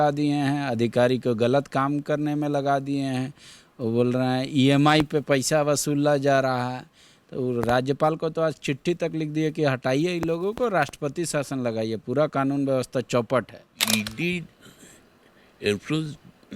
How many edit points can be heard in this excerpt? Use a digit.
1